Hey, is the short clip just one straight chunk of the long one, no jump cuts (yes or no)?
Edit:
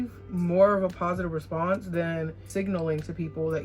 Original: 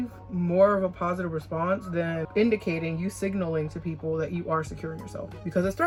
no